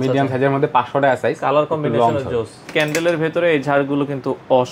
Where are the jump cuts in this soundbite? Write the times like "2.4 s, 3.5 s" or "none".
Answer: 2.6 s